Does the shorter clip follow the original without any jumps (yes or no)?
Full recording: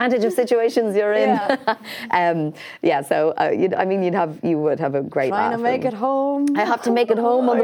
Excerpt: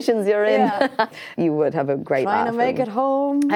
no